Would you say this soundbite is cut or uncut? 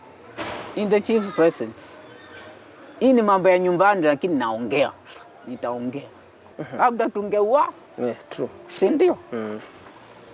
cut